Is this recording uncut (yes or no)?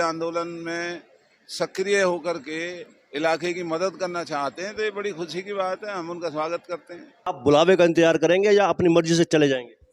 no